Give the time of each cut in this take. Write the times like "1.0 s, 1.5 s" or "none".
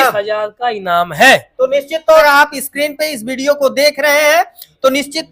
2.3 s

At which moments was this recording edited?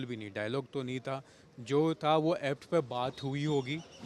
none

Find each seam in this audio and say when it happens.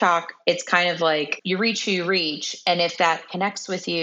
1.4 s

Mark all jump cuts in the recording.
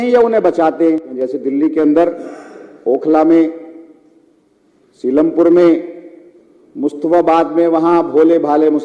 1.1 s

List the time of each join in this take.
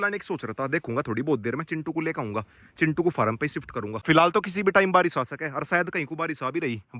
none

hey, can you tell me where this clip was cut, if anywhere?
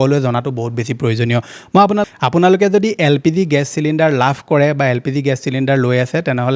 2.1 s

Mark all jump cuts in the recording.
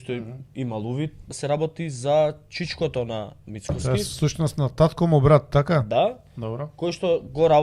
1.3 s, 3.5 s

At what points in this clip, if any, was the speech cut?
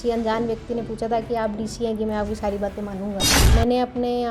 3.4 s

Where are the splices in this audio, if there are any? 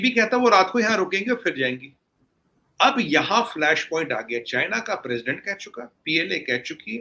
none

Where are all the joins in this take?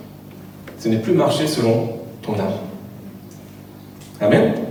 none

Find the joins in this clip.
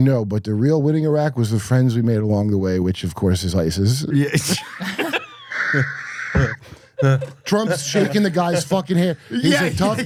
none

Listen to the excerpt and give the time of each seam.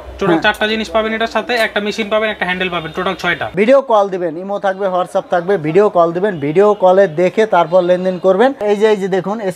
3.5 s, 8.6 s

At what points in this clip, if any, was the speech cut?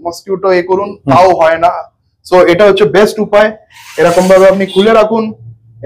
none

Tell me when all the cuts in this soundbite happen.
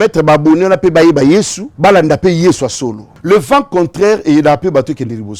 1.6 s, 3.1 s

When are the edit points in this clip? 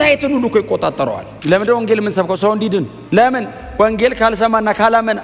1.3 s, 3.0 s

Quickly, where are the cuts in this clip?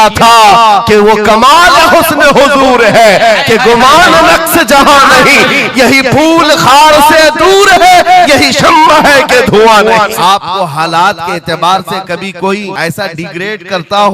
10.1 s, 12.7 s

